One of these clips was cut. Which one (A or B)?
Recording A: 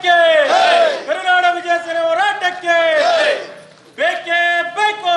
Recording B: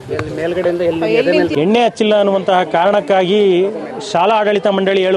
B